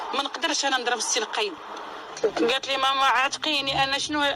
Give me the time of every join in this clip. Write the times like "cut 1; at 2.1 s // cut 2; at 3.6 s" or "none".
cut 1; at 2.2 s